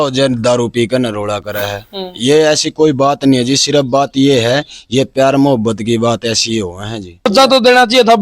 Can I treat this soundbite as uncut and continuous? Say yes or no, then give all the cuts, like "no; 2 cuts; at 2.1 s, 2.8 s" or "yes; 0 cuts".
no; 1 cut; at 7.3 s